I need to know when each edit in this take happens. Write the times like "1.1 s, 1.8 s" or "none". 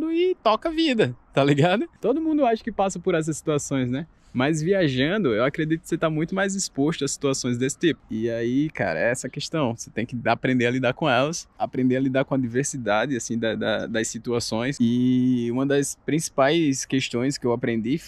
none